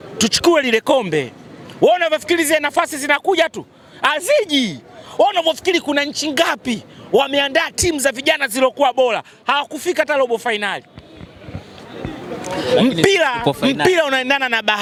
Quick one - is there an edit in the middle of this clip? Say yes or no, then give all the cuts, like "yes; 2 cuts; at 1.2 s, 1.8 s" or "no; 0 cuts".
no; 0 cuts